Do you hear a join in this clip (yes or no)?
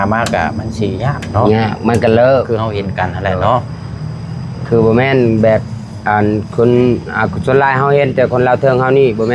no